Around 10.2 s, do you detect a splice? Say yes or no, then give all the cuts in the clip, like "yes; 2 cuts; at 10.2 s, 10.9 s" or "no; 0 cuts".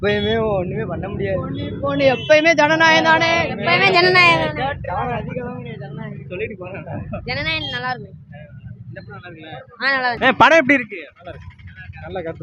yes; 1 cut; at 10.2 s